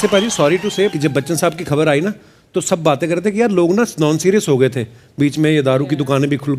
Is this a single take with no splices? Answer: no; 1 cut; at 0.9 s

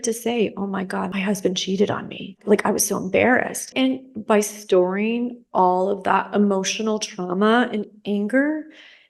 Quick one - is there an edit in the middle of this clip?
yes; 3 cuts; at 1.1 s, 2.4 s, 3.6 s

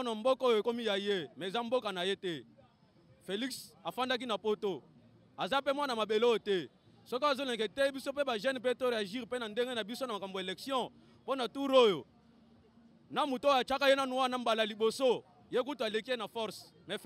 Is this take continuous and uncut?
yes; 0 cuts

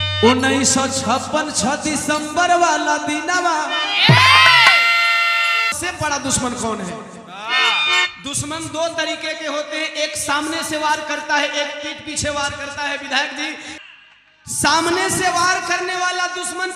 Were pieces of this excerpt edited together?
yes; 2 cuts; at 5.7 s, 13.7 s

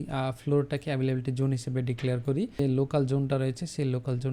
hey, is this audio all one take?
no; 1 cut; at 2.6 s

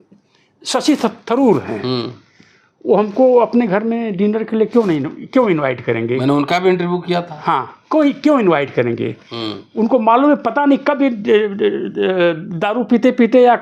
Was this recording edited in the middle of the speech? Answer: no; 0 cuts

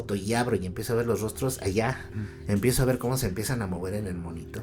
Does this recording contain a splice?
yes; 1 cut; at 2.1 s

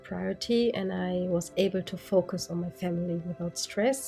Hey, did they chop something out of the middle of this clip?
no; 0 cuts

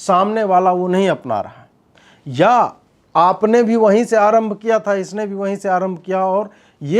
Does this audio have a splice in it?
no; 0 cuts

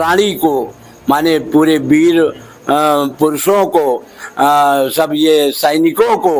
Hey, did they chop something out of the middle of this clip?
no; 0 cuts

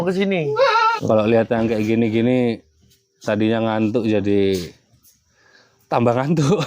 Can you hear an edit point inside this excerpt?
yes; 1 cut; at 1.0 s

